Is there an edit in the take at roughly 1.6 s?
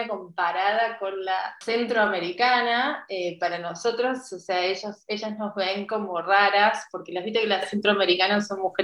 yes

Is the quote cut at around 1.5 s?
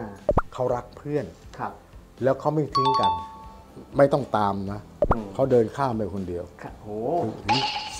no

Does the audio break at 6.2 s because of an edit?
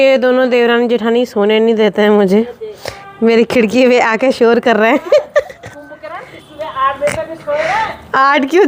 no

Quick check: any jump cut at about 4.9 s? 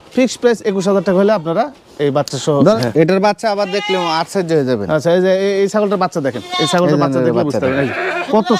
no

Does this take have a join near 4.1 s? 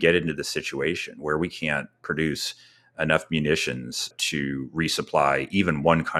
yes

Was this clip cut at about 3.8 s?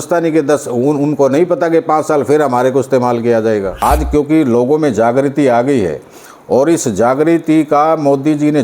yes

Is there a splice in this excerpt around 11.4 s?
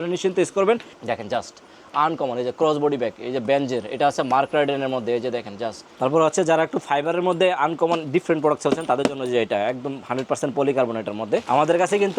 yes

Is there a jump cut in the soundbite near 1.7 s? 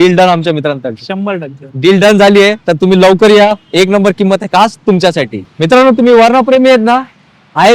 no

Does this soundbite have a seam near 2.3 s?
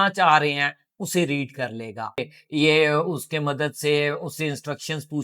yes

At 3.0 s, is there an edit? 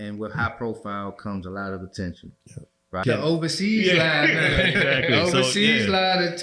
yes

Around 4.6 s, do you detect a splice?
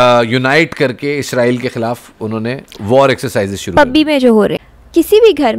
yes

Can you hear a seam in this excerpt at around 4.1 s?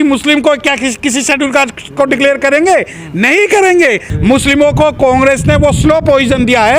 yes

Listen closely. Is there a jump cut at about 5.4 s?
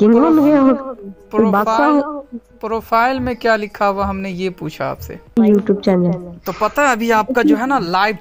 yes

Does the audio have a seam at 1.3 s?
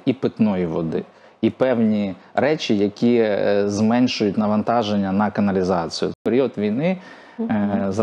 no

